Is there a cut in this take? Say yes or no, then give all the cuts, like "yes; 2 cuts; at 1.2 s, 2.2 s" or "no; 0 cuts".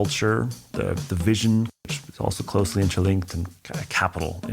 yes; 1 cut; at 1.8 s